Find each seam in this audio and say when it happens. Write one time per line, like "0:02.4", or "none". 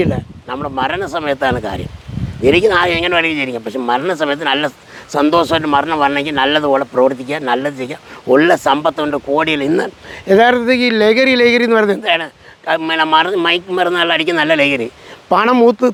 none